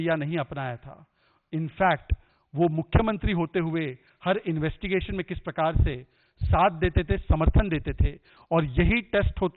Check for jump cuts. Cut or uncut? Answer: uncut